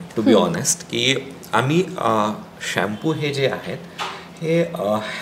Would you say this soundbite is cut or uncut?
uncut